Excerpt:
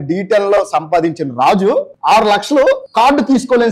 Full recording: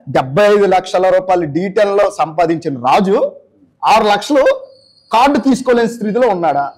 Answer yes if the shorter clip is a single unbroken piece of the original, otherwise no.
no